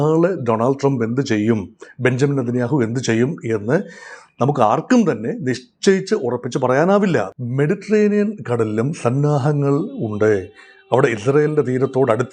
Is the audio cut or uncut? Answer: cut